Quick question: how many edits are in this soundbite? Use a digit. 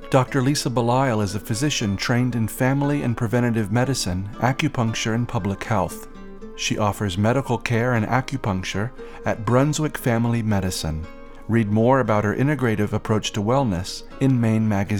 0